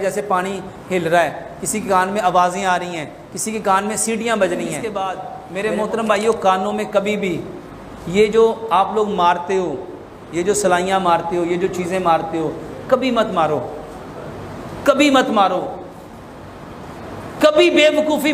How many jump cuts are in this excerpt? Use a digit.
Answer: 1